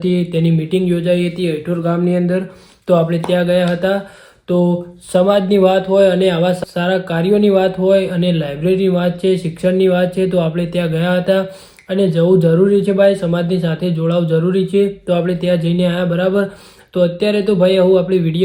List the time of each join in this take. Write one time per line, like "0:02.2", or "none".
none